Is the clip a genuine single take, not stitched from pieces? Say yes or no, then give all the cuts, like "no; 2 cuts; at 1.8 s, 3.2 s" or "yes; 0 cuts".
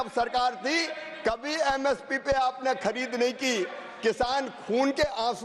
yes; 0 cuts